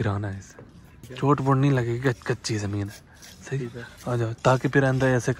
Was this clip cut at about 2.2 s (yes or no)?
no